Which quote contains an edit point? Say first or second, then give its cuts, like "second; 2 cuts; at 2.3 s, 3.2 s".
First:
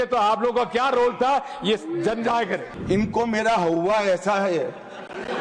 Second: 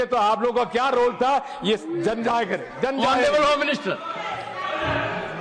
first; 1 cut; at 2.7 s